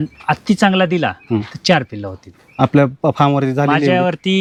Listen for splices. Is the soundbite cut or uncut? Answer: uncut